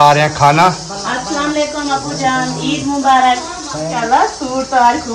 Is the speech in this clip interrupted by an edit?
yes; 1 cut; at 3.9 s

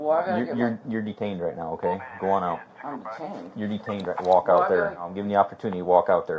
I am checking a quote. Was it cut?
yes; 1 cut; at 5.1 s

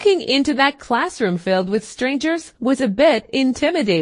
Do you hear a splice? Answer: no; 0 cuts

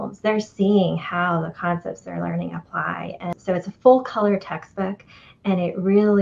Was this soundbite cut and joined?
yes; 1 cut; at 3.3 s

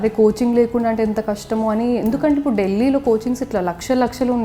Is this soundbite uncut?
yes; 0 cuts

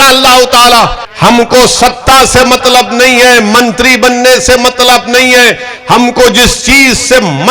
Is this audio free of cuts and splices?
no; 1 cut; at 1.0 s

